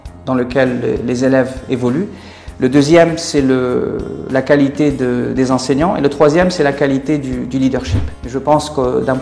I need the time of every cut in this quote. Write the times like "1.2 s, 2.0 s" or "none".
8.3 s